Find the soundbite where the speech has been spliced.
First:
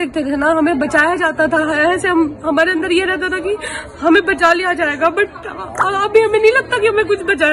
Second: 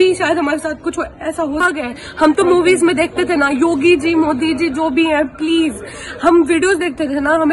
second; 1 cut; at 1.7 s

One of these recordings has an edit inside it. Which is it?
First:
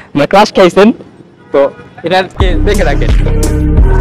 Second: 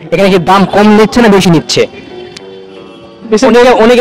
first; 1 cut; at 2.8 s

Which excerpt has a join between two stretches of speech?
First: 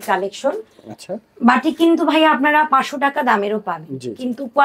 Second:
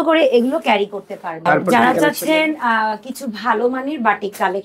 second; 1 cut; at 1.5 s

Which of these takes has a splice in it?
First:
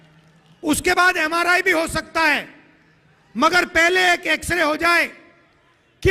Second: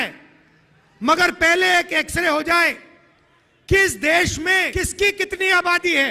second; 1 cut; at 4.8 s

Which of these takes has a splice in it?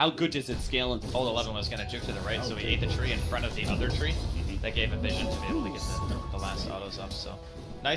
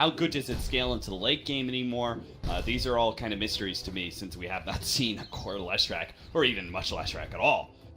second; 1 cut; at 1.1 s

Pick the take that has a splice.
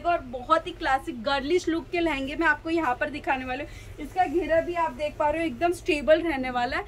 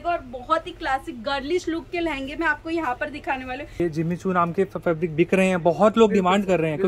second; 1 cut; at 3.8 s

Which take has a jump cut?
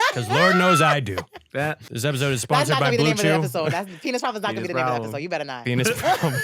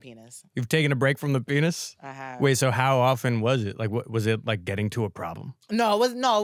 first; 1 cut; at 1.9 s

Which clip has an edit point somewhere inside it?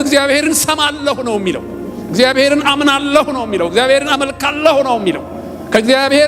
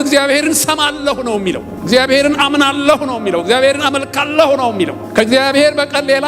second; 2 cuts; at 1.7 s, 5.0 s

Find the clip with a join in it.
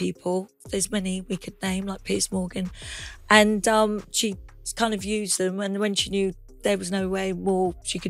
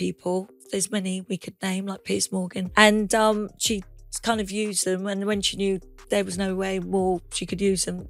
second; 1 cut; at 2.7 s

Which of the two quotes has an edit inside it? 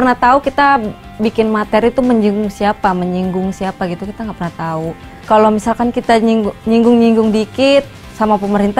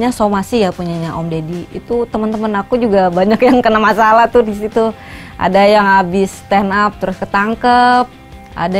first; 1 cut; at 5.2 s

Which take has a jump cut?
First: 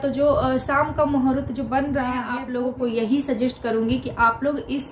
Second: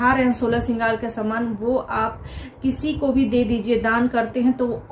first; 1 cut; at 2.4 s

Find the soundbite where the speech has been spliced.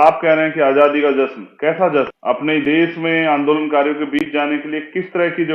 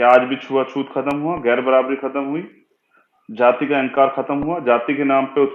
first; 1 cut; at 2.1 s

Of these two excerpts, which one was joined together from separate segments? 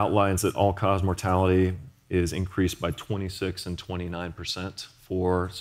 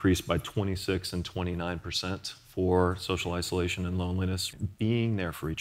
second; 1 cut; at 4.5 s

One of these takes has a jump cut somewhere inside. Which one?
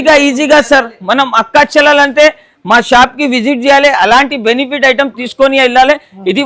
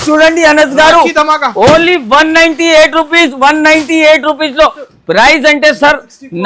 second; 1 cut; at 4.8 s

